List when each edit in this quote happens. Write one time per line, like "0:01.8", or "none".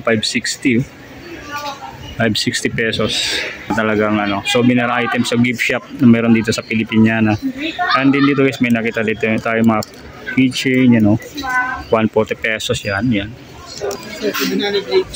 0:03.7
0:13.9